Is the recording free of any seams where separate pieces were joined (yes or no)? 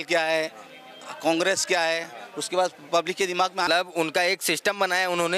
no